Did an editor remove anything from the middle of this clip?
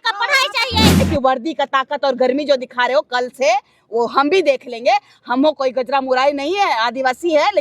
yes; 1 cut; at 1.0 s

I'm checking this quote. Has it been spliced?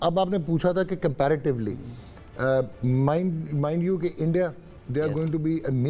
no; 0 cuts

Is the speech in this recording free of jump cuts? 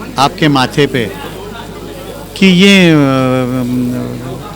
yes; 0 cuts

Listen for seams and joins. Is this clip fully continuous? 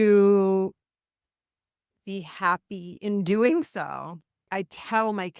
no; 1 cut; at 4.4 s

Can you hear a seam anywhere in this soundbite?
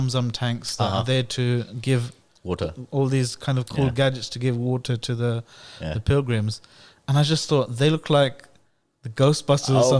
no; 0 cuts

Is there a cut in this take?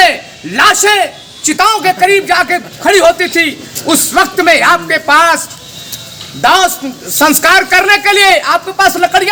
no; 0 cuts

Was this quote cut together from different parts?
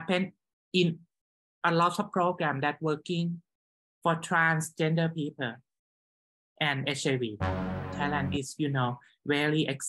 yes; 1 cut; at 7.9 s

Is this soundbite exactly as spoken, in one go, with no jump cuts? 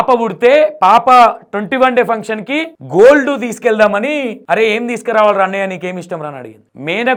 yes; 0 cuts

